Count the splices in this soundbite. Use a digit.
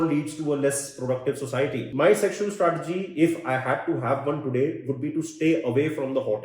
1